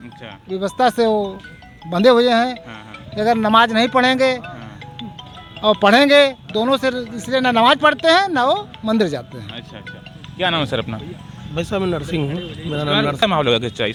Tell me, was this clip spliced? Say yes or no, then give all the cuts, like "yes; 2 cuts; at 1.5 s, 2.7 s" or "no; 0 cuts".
no; 0 cuts